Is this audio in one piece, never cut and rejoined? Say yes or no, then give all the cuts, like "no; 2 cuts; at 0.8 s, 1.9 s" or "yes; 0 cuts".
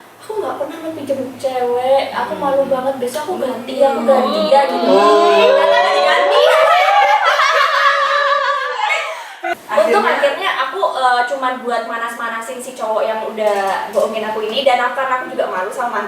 no; 1 cut; at 9.6 s